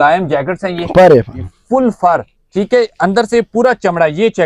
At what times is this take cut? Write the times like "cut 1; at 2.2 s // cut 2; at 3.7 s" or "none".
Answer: none